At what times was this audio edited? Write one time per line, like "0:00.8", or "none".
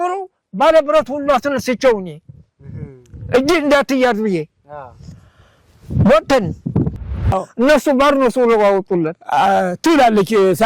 0:07.2